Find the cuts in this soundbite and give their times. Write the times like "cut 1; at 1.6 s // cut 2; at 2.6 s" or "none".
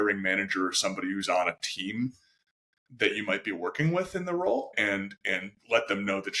cut 1; at 4.7 s